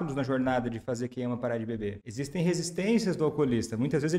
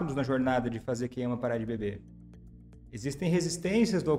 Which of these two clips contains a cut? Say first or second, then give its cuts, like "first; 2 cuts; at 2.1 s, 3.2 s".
first; 1 cut; at 2.0 s